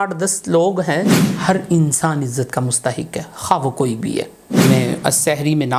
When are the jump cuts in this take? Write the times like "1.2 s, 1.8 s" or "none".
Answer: 1.1 s, 4.4 s